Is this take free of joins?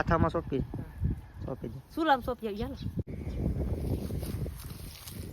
no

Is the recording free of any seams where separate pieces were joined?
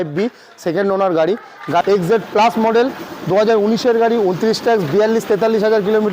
no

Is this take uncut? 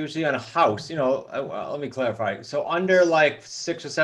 yes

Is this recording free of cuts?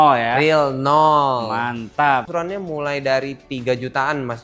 no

